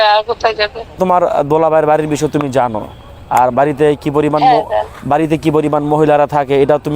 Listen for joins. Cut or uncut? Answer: cut